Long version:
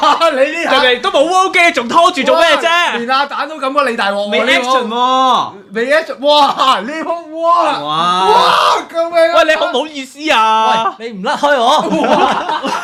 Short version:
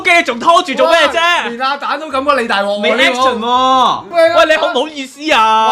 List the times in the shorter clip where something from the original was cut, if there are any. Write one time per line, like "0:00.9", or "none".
0:04.1